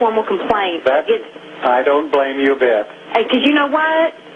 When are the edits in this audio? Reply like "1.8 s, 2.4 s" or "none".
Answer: 1.4 s